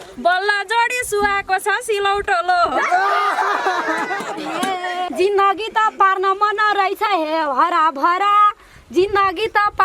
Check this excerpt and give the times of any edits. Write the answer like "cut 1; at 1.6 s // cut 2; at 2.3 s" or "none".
cut 1; at 5.1 s